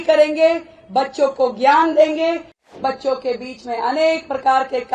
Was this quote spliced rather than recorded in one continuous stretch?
yes; 1 cut; at 2.8 s

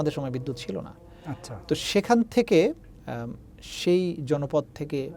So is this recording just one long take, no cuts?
yes; 0 cuts

